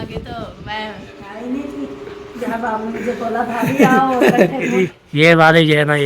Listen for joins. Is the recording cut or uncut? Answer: cut